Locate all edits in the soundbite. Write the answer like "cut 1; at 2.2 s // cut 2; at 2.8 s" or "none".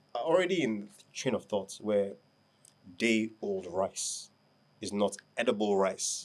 none

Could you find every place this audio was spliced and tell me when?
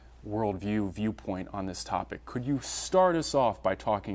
none

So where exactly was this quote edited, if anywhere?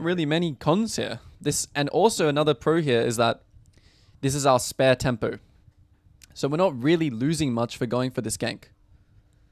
none

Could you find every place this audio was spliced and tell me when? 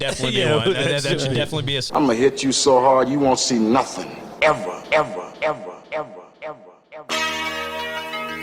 cut 1; at 1.9 s

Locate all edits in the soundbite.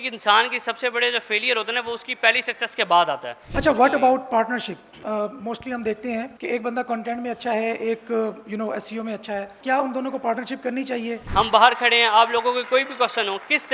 cut 1; at 3.4 s // cut 2; at 6.3 s // cut 3; at 9.6 s // cut 4; at 11.2 s

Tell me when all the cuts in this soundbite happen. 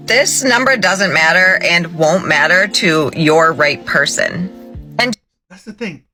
none

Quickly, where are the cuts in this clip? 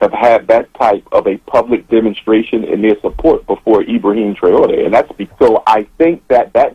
cut 1; at 5.2 s

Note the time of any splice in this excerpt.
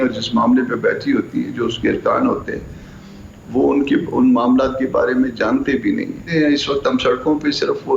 cut 1; at 6.2 s

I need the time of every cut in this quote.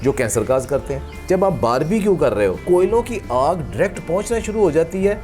cut 1; at 1.1 s // cut 2; at 2.6 s

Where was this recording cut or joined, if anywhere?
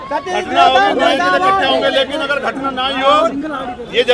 none

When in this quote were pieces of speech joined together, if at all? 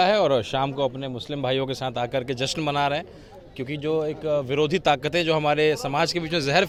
none

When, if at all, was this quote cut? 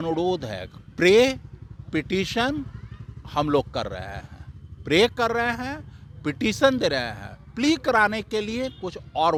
none

